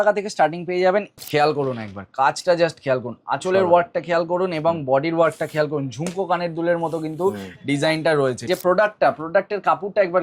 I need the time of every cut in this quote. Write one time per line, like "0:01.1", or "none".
0:01.2
0:08.5